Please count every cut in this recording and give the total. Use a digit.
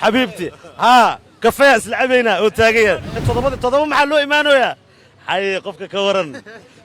1